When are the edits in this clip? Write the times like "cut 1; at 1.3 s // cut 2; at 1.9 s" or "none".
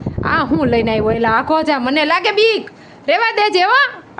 none